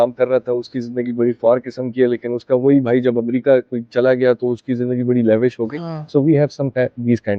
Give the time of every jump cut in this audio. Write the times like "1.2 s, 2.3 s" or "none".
none